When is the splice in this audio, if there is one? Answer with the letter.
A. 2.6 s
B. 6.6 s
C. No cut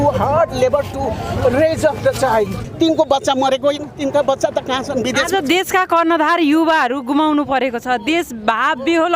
A